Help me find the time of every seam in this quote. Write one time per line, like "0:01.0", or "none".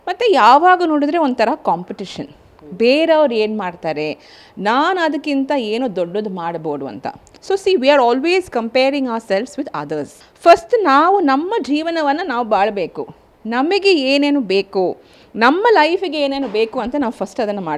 none